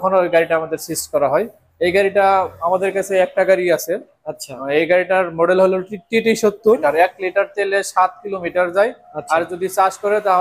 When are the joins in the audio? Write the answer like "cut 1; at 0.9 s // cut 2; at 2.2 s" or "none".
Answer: cut 1; at 6.8 s